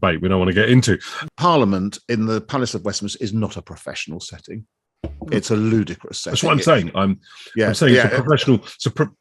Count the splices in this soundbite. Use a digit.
1